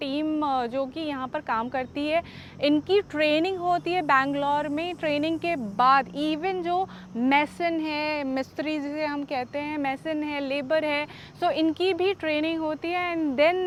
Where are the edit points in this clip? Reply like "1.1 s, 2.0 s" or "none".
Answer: none